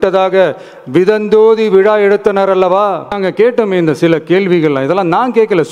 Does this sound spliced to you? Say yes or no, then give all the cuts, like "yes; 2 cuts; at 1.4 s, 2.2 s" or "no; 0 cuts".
yes; 1 cut; at 3.1 s